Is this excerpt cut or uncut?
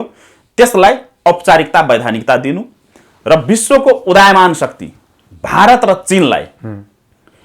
uncut